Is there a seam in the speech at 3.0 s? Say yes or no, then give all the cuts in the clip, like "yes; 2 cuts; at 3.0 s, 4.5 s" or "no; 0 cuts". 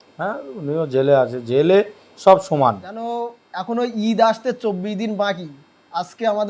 yes; 1 cut; at 3.0 s